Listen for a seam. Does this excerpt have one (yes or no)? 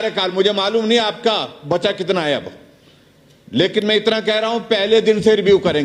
no